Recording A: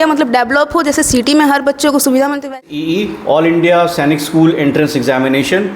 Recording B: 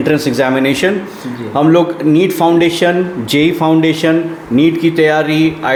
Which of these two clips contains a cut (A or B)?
A